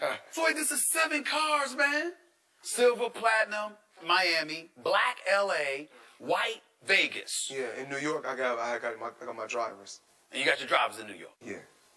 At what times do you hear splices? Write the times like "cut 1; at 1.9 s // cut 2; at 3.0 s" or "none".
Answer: cut 1; at 10.9 s